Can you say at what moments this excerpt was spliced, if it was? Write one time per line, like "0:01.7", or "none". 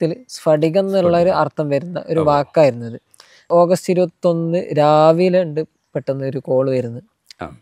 0:03.5